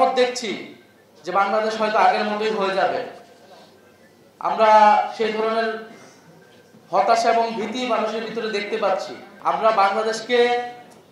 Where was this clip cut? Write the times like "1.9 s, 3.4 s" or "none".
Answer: 9.2 s

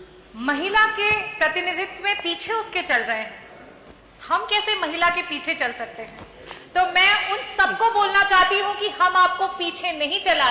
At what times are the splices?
none

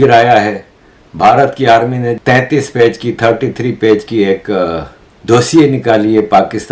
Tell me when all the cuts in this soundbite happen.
2.2 s

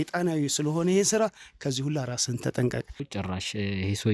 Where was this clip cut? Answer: 3.0 s

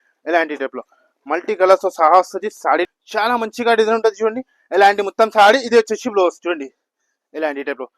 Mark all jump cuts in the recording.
2.9 s

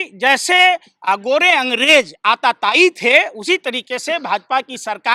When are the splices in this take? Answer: none

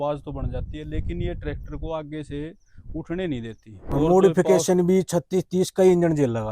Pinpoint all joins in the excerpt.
3.7 s

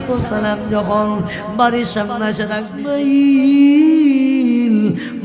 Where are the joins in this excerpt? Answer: 2.7 s

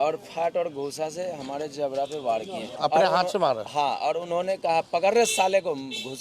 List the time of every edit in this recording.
2.7 s

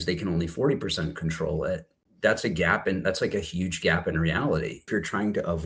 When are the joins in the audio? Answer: 2.0 s, 4.9 s

